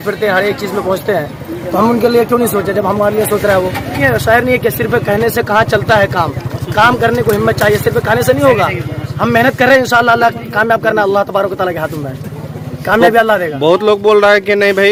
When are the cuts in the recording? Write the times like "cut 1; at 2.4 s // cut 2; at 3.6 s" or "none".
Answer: none